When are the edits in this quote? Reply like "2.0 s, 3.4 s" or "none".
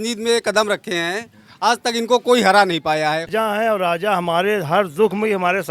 3.3 s